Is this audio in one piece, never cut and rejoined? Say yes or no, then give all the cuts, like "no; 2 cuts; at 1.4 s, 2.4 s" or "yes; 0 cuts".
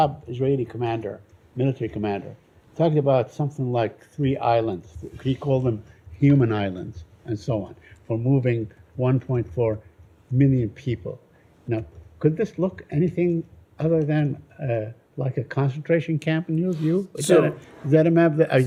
yes; 0 cuts